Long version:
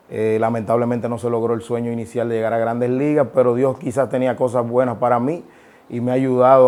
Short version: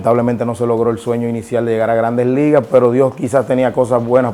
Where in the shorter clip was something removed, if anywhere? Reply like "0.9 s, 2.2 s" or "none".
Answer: none